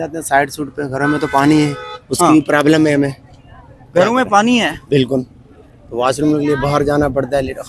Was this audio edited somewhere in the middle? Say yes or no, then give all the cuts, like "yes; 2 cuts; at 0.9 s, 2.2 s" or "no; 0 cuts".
no; 0 cuts